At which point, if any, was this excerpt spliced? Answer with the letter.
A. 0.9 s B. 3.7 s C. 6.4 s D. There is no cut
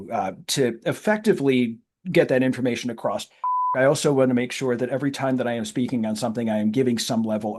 B